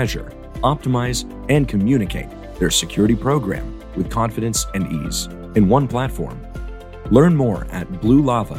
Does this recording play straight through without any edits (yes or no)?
yes